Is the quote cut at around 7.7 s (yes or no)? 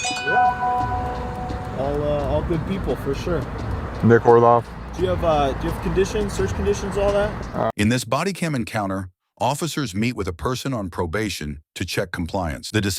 yes